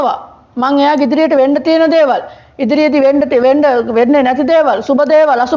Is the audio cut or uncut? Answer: uncut